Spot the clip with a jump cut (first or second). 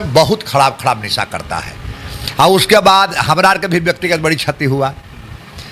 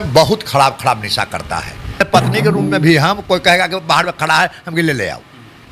second